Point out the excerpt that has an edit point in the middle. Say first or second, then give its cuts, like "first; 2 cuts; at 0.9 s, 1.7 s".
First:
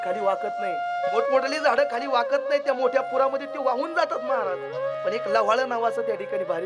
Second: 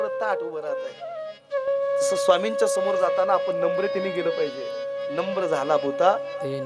first; 2 cuts; at 1.1 s, 4.9 s